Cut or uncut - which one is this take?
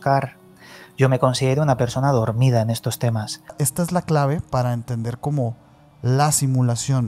cut